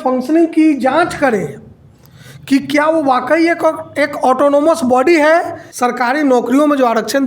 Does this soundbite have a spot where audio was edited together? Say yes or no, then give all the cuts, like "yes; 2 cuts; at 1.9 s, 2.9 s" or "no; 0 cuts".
yes; 1 cut; at 5.6 s